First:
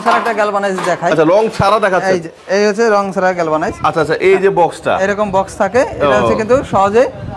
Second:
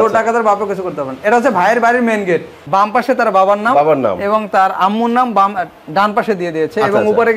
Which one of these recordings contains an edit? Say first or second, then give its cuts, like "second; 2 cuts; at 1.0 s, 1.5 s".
second; 1 cut; at 2.5 s